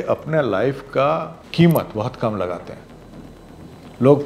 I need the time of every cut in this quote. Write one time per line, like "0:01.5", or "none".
0:01.4